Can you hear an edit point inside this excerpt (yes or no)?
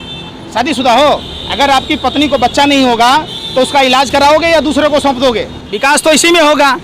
yes